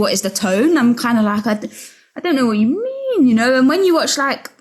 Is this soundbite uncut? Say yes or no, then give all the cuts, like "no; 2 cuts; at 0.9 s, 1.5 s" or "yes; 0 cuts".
yes; 0 cuts